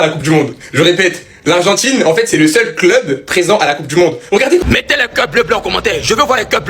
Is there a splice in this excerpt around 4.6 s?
yes; 1 cut; at 4.6 s

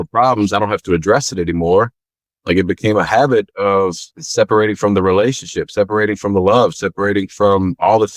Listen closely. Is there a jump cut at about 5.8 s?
no; 2 cuts; at 2.3 s, 4.2 s

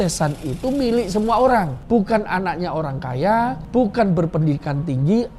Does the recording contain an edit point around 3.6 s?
yes; 2 cuts; at 1.8 s, 3.6 s

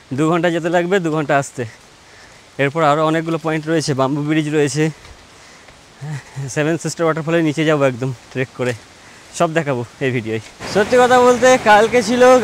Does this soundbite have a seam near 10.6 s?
yes; 1 cut; at 10.6 s

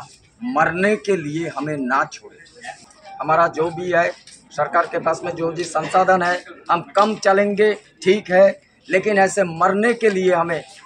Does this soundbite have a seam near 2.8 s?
yes; 1 cut; at 2.8 s

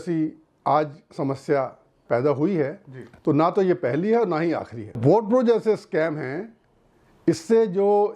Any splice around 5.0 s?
yes; 1 cut; at 5.0 s

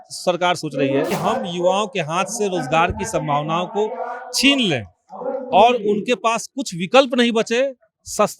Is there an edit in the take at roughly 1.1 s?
yes; 1 cut; at 1.1 s

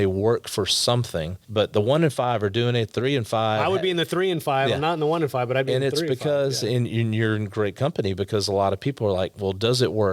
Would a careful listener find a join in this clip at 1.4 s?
yes; 1 cut; at 1.4 s

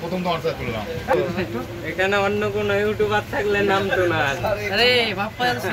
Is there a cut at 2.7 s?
no; 1 cut; at 1.1 s

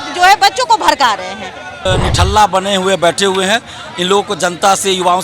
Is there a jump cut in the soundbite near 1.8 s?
yes; 1 cut; at 1.8 s

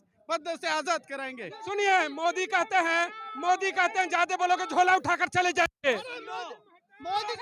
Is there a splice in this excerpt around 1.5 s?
yes; 1 cut; at 1.5 s

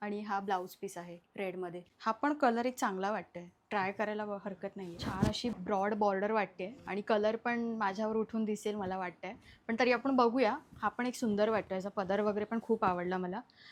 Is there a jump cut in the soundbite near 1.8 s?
no; 0 cuts

